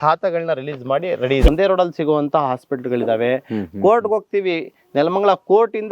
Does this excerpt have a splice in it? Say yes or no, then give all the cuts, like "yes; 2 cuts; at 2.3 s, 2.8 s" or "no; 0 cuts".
yes; 1 cut; at 1.5 s